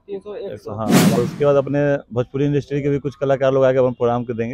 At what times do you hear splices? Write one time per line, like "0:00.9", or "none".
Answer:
0:01.2